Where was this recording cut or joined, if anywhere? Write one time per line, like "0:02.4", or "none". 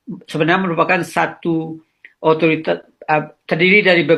none